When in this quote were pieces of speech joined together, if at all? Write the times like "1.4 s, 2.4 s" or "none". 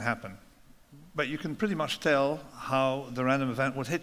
none